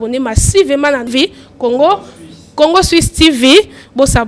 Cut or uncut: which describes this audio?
cut